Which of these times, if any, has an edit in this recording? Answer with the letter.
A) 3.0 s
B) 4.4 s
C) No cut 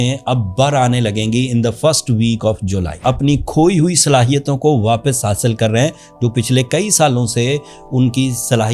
A